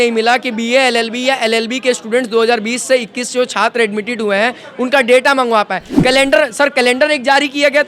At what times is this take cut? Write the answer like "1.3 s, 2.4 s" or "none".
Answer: 5.8 s